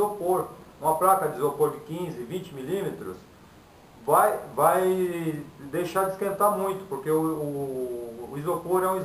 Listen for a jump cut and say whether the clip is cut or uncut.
uncut